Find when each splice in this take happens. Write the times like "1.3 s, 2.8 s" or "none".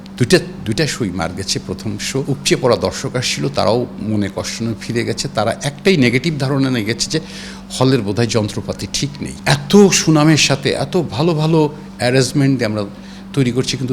2.2 s, 9.3 s